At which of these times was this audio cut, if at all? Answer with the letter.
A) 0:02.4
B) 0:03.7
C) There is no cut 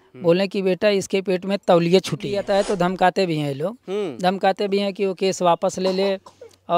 A